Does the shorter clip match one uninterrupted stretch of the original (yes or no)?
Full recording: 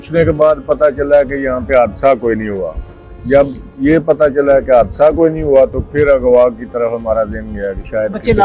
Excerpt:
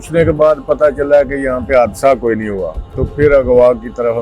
no